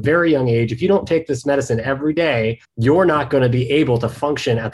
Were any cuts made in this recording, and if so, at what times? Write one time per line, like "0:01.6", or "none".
0:02.7